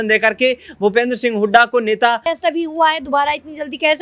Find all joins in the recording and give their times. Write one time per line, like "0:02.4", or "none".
0:02.2